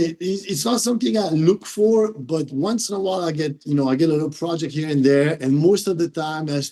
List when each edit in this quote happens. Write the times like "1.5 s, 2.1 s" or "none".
none